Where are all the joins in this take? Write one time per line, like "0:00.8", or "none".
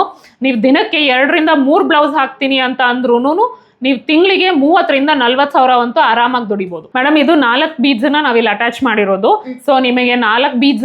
0:06.9